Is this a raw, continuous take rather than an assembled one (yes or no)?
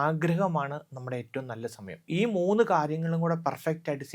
no